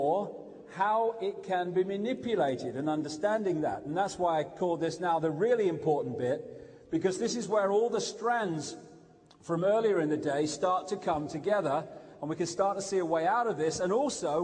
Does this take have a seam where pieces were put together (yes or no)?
yes